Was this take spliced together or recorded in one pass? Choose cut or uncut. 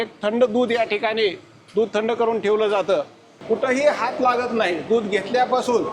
cut